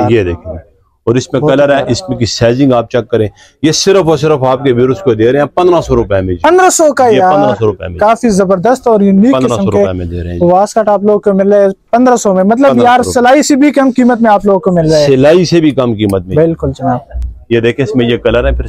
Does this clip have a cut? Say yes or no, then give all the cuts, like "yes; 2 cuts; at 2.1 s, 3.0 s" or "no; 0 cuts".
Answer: no; 0 cuts